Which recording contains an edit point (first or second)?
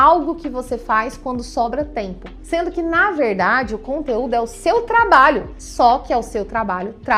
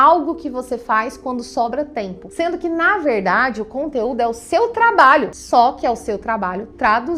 second